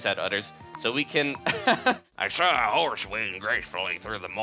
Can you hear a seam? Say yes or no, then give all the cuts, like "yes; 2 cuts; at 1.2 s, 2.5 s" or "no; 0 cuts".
yes; 1 cut; at 2.1 s